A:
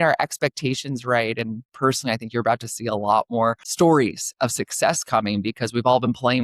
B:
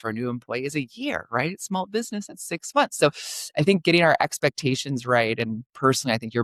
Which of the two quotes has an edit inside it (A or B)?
A